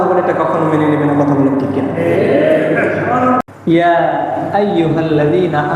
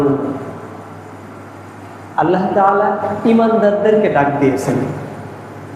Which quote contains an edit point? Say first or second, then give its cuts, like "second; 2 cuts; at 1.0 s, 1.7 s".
first; 1 cut; at 3.4 s